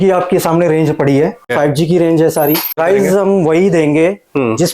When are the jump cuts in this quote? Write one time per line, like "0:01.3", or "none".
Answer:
0:01.5
0:02.8